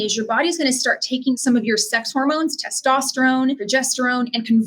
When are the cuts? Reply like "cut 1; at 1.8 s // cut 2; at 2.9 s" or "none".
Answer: cut 1; at 1.3 s // cut 2; at 3.6 s

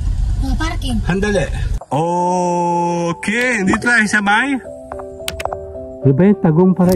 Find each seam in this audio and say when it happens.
cut 1; at 1.7 s

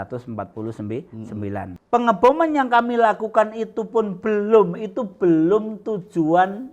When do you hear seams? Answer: cut 1; at 1.7 s

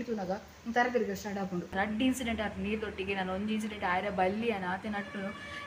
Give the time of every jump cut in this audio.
cut 1; at 1.7 s

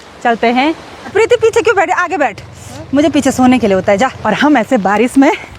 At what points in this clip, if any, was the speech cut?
cut 1; at 0.9 s // cut 2; at 4.2 s

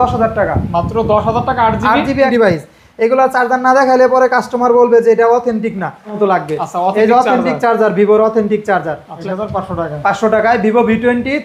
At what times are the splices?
cut 1; at 2.3 s // cut 2; at 6.1 s // cut 3; at 9.1 s

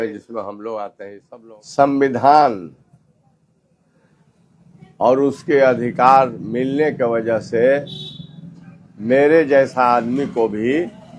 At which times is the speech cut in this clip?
cut 1; at 1.2 s

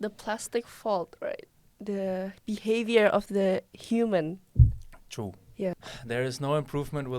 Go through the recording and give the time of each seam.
cut 1; at 5.7 s

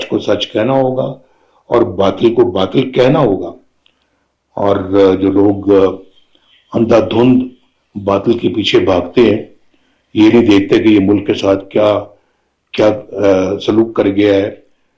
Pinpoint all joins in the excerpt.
none

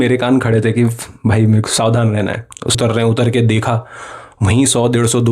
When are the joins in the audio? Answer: cut 1; at 2.8 s

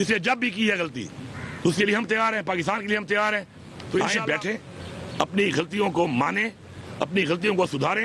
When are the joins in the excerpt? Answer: cut 1; at 4.0 s

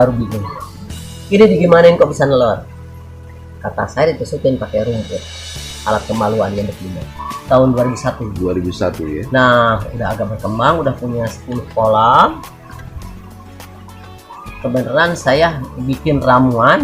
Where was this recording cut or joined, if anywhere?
cut 1; at 7.3 s

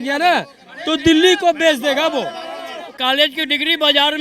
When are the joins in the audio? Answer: cut 1; at 2.9 s

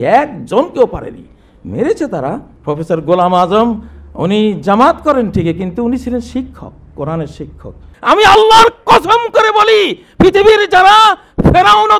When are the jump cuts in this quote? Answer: cut 1; at 2.5 s // cut 2; at 7.9 s

